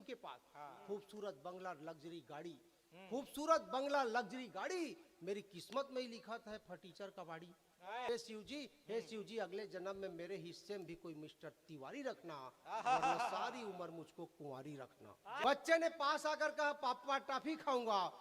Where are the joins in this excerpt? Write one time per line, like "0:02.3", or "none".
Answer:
0:15.4